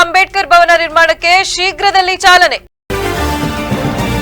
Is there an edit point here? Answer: yes; 1 cut; at 2.7 s

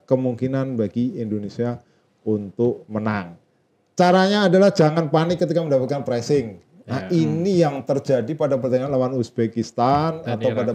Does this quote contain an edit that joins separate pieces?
no; 0 cuts

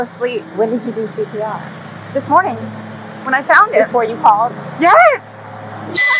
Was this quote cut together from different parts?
no; 0 cuts

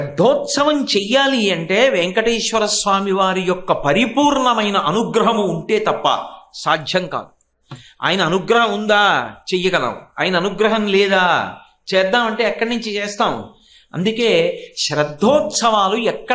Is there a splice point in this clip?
no; 0 cuts

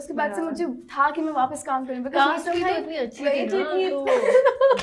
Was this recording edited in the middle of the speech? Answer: no; 0 cuts

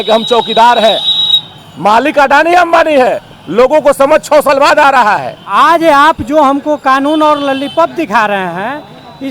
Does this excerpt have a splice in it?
yes; 1 cut; at 5.4 s

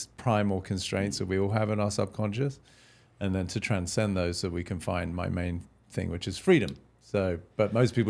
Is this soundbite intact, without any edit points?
yes; 0 cuts

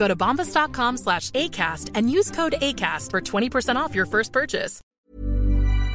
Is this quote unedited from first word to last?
no; 1 cut; at 4.9 s

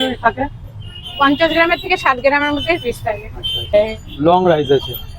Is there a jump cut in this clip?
yes; 1 cut; at 3.7 s

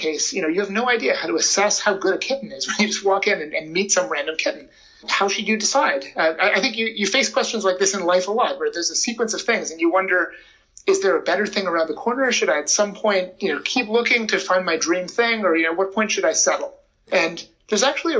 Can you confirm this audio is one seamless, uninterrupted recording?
no; 1 cut; at 16.9 s

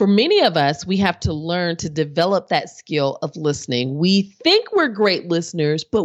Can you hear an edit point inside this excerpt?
no; 0 cuts

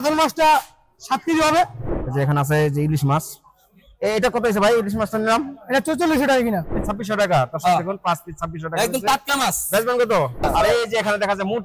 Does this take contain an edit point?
yes; 3 cuts; at 1.8 s, 6.8 s, 10.4 s

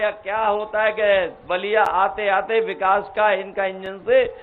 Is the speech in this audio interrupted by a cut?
no; 0 cuts

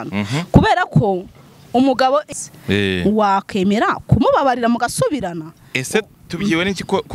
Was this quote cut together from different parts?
yes; 1 cut; at 2.3 s

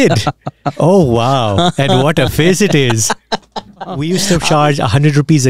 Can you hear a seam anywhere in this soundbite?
yes; 1 cut; at 4.0 s

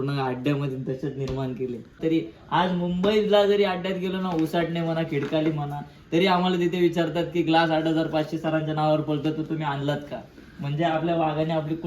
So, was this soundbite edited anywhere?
yes; 1 cut; at 2.0 s

